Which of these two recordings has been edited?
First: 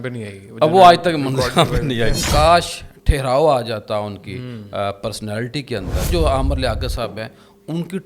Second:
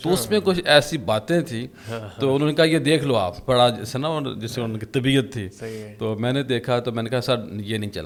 first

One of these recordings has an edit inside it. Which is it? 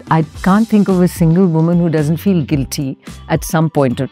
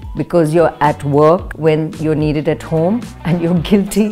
second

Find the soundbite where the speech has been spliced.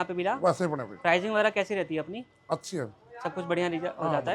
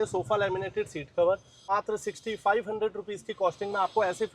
second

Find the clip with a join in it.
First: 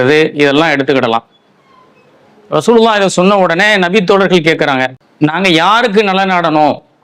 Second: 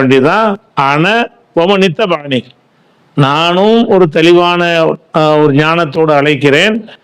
first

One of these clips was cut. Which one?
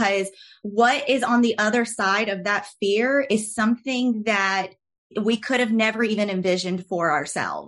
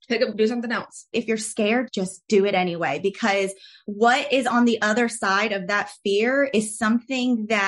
second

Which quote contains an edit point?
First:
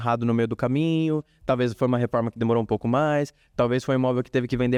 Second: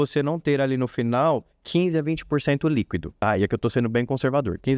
second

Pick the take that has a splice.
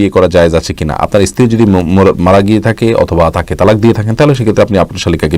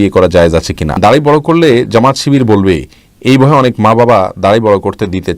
second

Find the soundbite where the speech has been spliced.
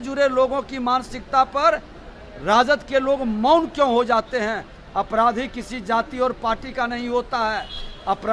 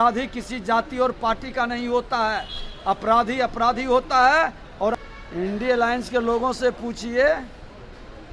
second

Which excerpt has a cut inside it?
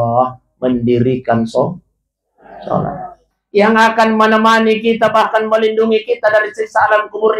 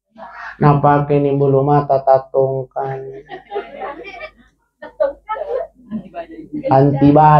first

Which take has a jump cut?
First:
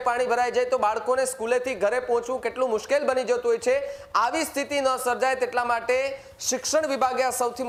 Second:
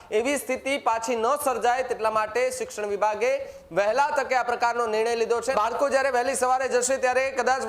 second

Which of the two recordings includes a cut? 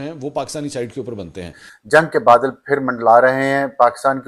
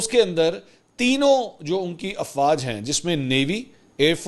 first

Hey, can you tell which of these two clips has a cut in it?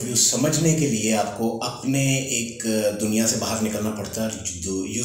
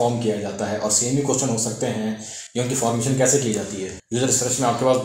second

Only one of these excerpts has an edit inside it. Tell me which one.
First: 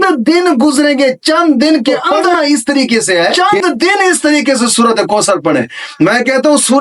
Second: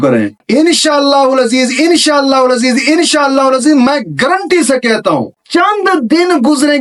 first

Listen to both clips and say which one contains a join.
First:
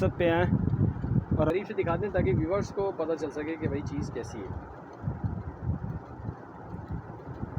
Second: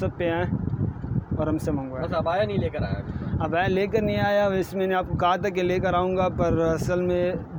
first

